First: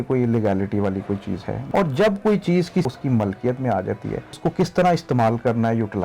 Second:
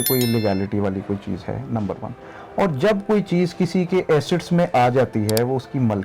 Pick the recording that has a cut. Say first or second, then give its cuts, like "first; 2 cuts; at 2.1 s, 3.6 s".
first; 3 cuts; at 1.5 s, 2.9 s, 4.3 s